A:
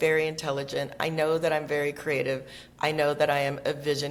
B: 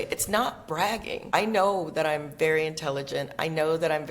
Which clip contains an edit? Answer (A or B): B